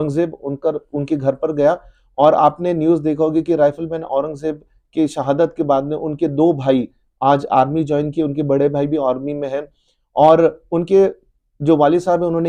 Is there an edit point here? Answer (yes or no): no